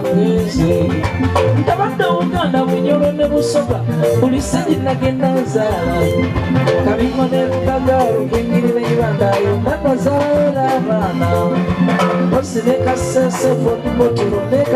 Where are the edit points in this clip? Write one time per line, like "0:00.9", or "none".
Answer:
none